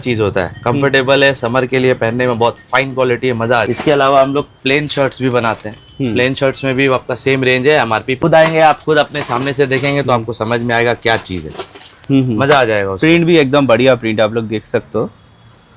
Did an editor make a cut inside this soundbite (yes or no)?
yes